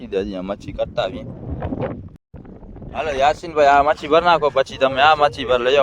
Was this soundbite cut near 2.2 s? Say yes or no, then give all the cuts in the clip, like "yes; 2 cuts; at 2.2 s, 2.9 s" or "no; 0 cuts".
yes; 1 cut; at 2.2 s